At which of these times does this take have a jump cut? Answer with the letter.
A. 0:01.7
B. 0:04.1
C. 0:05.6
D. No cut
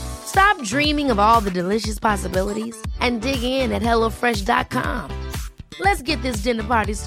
D